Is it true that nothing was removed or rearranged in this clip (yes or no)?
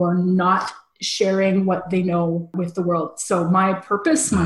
no